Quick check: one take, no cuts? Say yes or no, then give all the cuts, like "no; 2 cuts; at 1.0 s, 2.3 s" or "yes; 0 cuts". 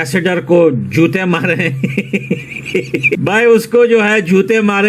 no; 1 cut; at 3.2 s